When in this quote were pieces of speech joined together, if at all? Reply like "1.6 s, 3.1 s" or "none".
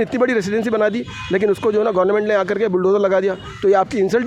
none